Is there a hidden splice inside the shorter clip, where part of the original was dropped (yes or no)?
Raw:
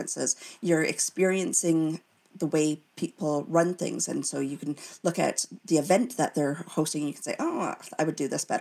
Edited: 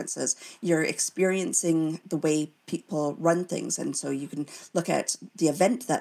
yes